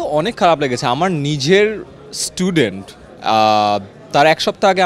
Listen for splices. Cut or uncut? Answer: uncut